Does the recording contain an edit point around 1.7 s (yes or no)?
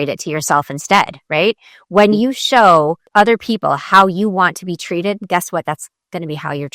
no